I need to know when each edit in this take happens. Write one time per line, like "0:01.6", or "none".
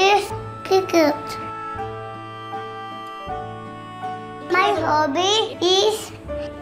none